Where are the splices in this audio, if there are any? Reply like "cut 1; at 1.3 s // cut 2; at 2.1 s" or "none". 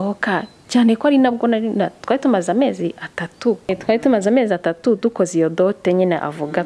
cut 1; at 3.8 s